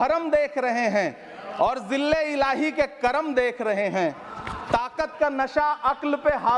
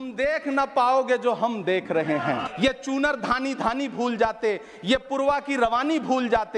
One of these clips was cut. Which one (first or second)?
second